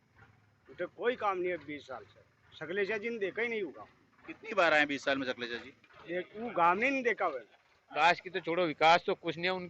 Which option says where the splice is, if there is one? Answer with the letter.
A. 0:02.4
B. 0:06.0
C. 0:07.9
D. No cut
C